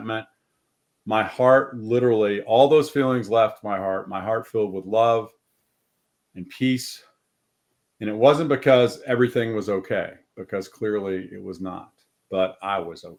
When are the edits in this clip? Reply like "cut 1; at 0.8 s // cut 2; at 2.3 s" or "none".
none